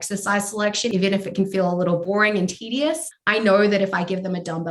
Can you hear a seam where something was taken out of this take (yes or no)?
yes